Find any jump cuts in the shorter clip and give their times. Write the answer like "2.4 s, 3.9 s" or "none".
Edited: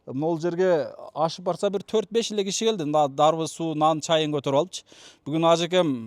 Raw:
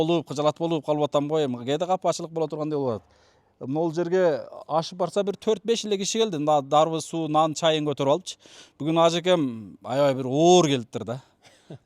none